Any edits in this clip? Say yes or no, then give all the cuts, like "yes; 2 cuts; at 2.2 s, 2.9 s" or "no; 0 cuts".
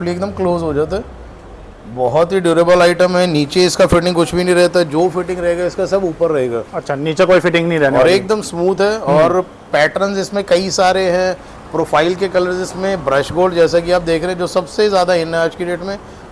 no; 0 cuts